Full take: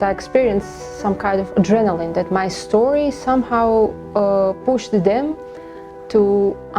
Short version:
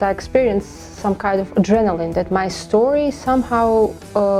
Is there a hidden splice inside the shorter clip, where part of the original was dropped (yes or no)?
no